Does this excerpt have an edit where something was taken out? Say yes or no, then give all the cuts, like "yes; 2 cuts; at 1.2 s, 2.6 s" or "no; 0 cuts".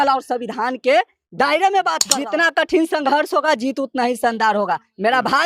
yes; 1 cut; at 2.0 s